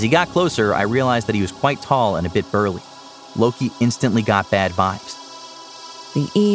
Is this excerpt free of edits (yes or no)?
no